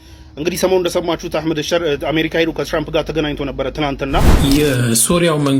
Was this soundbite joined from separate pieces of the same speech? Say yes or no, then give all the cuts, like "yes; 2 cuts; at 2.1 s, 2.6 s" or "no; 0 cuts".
yes; 1 cut; at 4.3 s